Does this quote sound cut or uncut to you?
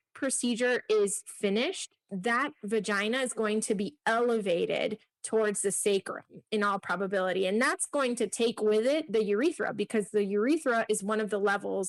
uncut